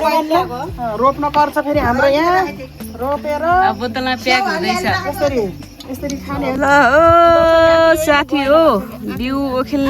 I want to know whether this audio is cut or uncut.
cut